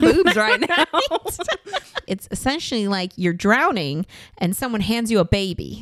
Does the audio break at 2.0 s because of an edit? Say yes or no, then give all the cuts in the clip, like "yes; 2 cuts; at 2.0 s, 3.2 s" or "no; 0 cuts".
yes; 1 cut; at 2.0 s